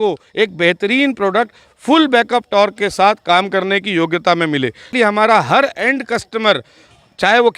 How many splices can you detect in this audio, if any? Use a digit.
1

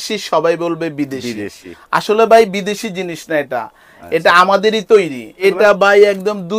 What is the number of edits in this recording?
1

